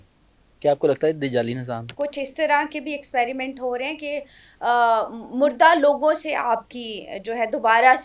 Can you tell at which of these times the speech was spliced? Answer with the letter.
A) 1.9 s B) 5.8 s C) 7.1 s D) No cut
A